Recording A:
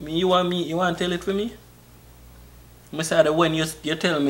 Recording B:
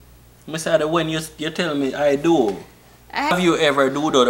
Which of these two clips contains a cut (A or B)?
B